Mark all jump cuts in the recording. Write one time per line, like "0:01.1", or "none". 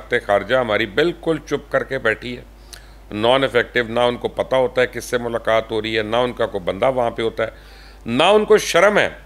none